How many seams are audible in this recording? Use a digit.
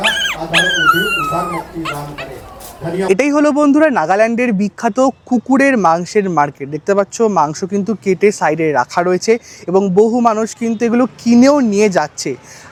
0